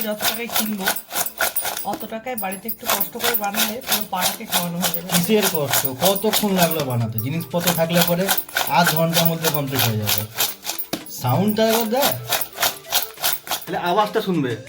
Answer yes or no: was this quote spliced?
yes